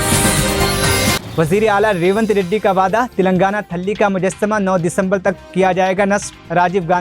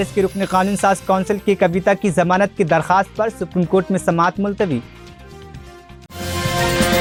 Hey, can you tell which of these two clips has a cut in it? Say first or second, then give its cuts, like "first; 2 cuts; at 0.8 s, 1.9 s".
first; 1 cut; at 1.2 s